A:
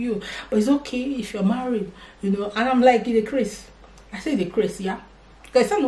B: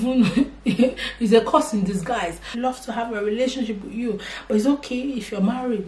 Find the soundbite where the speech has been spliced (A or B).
B